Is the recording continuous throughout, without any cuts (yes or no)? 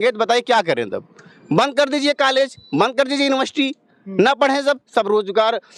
yes